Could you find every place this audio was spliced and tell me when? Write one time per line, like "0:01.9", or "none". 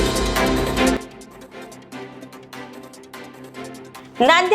0:01.0
0:02.8
0:03.7